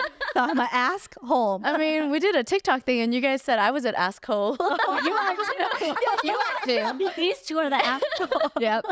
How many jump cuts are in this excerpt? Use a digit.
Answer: 2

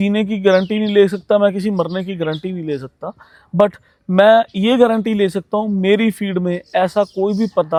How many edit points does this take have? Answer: 0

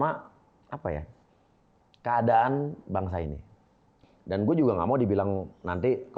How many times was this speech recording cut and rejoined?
1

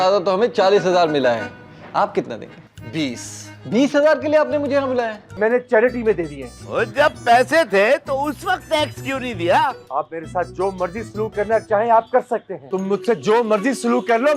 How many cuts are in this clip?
2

